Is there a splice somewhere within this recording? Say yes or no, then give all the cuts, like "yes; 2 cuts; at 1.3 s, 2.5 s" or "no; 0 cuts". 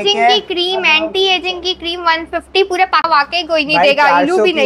yes; 1 cut; at 3.1 s